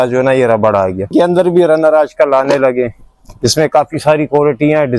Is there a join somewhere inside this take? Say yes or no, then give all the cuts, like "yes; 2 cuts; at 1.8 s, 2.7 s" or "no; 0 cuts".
yes; 1 cut; at 1.1 s